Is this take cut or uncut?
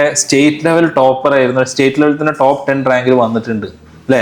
uncut